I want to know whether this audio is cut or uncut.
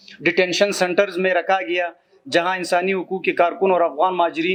uncut